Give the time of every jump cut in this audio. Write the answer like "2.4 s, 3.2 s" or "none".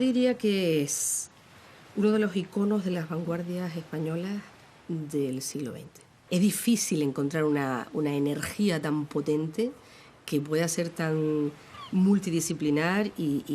6.1 s